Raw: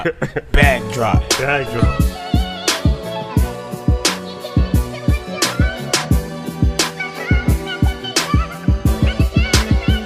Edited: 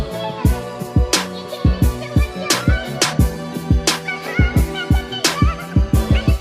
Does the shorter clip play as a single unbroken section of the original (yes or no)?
yes